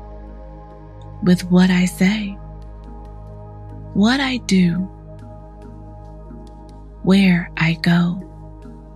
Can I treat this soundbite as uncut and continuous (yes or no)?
yes